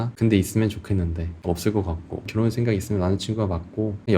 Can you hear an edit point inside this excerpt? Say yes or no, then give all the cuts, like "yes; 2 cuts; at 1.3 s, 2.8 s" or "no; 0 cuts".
yes; 1 cut; at 2.3 s